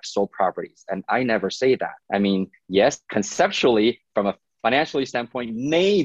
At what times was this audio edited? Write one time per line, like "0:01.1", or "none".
0:02.0
0:03.0